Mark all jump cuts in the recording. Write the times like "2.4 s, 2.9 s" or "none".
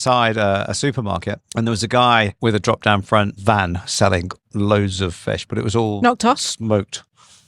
1.4 s, 2.3 s, 3.4 s